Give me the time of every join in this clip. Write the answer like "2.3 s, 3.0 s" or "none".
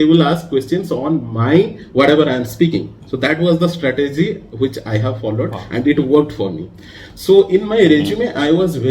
none